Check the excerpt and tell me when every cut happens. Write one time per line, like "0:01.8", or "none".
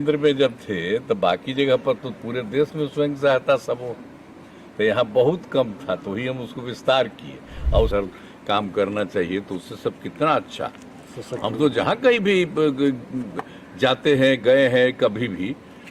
0:07.9